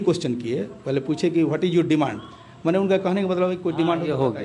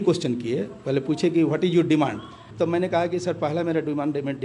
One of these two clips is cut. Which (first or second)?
second